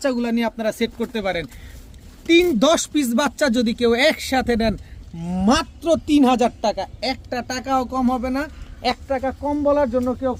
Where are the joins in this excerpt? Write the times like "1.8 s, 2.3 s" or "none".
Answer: none